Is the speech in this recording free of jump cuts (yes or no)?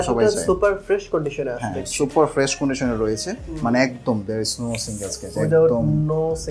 yes